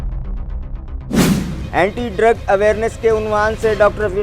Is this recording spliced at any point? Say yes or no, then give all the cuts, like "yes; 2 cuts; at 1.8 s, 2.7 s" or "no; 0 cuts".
yes; 1 cut; at 1.2 s